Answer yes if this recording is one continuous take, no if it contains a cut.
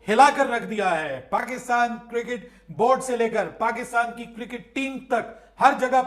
yes